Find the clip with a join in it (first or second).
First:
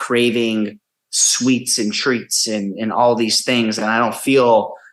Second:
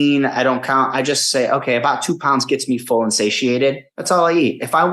second